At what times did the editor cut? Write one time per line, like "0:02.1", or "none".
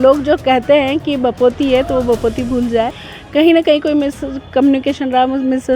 0:03.0